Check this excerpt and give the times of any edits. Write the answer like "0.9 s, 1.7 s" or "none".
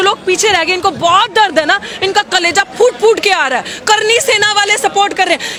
none

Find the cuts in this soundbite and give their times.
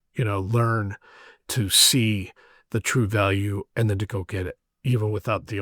4.7 s

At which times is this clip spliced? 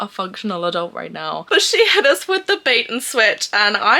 1.4 s

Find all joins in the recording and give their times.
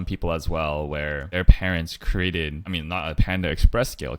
1.3 s, 2.7 s

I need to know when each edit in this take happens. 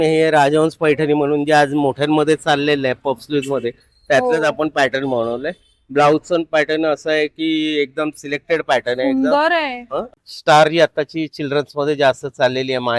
10.1 s

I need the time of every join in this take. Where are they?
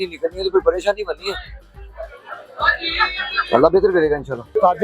none

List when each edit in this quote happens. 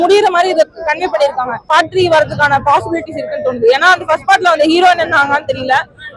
1.7 s

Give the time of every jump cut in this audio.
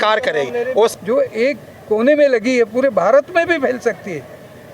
1.0 s

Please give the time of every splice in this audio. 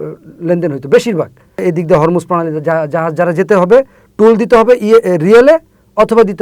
1.6 s

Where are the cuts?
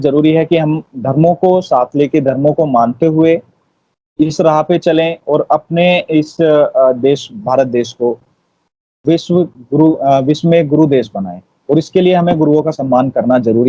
none

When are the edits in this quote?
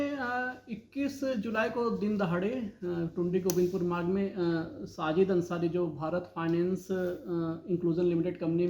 none

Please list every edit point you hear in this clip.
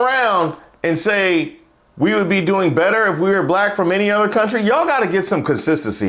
none

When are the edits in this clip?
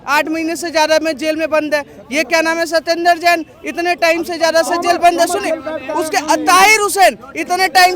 none

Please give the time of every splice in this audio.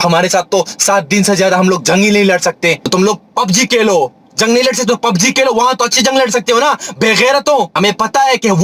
2.9 s, 7.8 s

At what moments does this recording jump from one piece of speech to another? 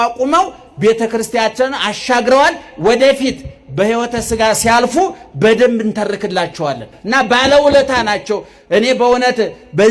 6.9 s

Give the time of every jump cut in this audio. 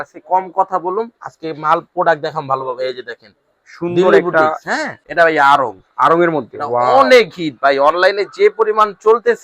5.1 s

